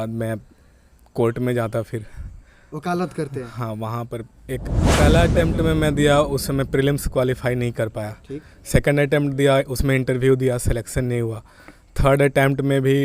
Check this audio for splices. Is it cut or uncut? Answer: cut